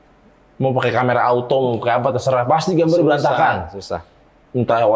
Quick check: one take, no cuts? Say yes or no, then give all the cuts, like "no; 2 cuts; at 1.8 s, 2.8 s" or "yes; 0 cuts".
yes; 0 cuts